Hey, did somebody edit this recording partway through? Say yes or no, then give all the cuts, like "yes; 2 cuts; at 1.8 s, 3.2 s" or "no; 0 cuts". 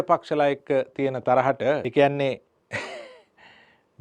yes; 1 cut; at 1.9 s